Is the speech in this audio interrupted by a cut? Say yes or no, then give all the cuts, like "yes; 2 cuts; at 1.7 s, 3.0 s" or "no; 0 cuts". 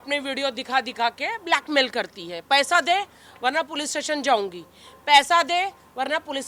no; 0 cuts